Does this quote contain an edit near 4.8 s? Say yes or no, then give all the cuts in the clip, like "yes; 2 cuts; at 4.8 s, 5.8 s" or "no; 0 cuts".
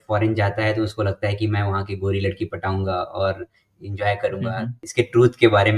yes; 1 cut; at 4.8 s